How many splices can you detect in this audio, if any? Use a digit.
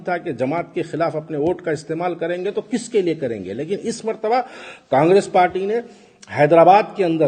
0